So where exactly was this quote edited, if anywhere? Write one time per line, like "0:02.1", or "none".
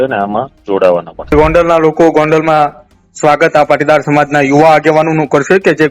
0:01.3